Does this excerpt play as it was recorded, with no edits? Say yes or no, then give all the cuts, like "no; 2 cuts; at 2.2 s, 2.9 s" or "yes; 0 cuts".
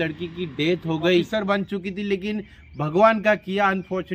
no; 1 cut; at 1.3 s